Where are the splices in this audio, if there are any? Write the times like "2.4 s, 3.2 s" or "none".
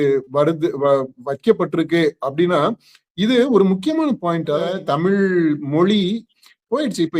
4.8 s